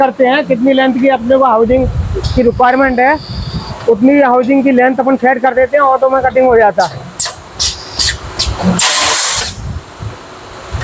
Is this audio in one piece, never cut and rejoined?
yes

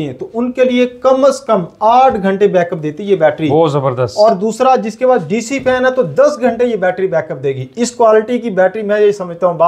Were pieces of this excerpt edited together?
no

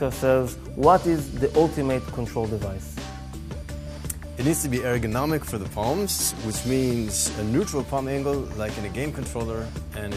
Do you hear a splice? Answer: yes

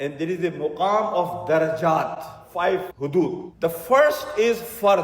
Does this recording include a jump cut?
yes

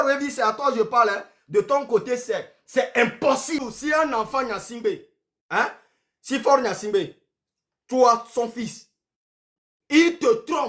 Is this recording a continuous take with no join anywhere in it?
no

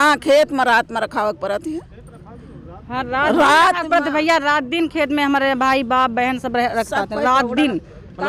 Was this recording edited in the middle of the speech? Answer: no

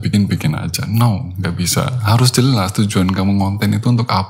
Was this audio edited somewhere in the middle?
no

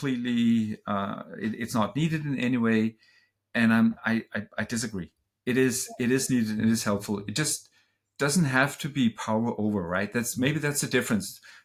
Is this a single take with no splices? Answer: yes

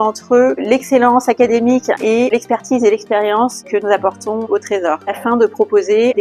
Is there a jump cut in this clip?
no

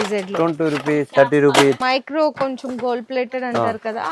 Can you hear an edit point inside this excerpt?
yes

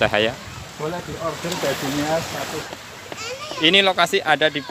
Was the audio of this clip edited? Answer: yes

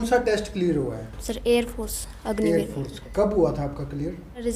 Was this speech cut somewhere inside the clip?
no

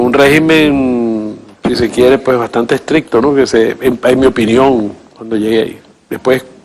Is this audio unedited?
no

